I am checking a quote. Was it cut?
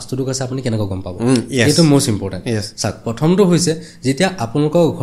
no; 0 cuts

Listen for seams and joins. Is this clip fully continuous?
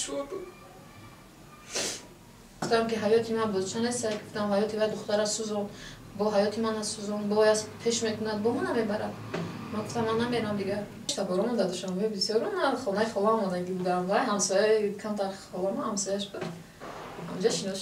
no; 2 cuts; at 2.6 s, 11.2 s

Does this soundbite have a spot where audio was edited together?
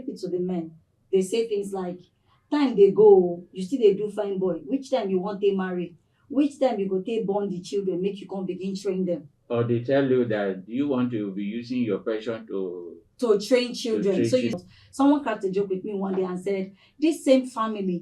yes; 1 cut; at 14.5 s

